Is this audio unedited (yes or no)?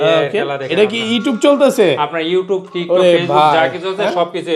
yes